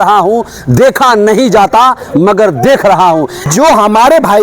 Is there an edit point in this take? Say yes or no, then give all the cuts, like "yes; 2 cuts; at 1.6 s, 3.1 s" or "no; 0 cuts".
yes; 1 cut; at 3.4 s